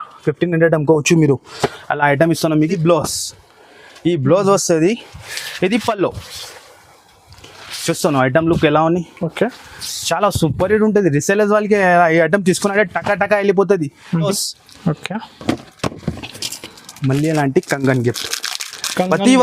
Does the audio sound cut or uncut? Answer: cut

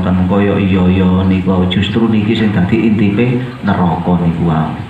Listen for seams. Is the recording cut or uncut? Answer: uncut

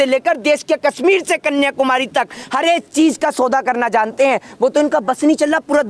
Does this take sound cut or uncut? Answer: uncut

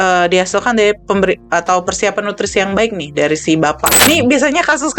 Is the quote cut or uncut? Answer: cut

